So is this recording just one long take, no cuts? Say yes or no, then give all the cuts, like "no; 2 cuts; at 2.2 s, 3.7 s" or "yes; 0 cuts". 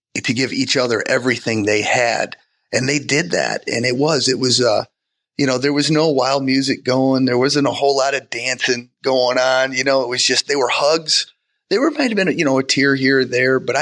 yes; 0 cuts